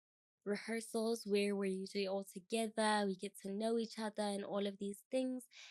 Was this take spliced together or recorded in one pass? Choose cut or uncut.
uncut